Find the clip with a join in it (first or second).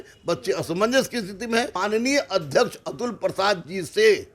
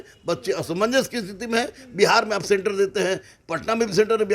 first